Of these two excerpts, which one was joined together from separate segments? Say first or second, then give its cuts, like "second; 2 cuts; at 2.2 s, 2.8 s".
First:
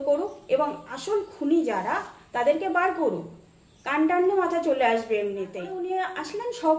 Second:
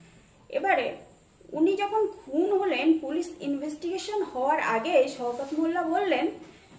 first; 1 cut; at 5.8 s